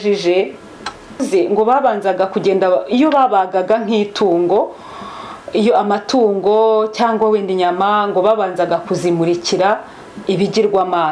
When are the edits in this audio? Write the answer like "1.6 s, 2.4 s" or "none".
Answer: 1.2 s